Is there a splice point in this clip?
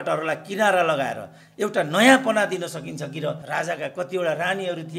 yes; 1 cut; at 3.4 s

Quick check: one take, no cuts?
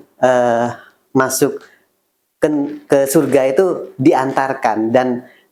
yes; 0 cuts

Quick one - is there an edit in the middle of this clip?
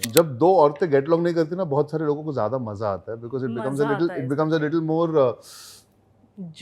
no; 0 cuts

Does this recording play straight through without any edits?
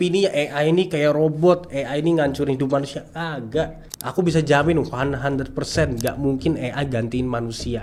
yes; 0 cuts

